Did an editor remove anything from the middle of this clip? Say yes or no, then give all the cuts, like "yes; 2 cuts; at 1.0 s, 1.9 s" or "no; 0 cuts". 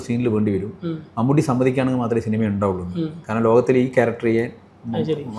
no; 0 cuts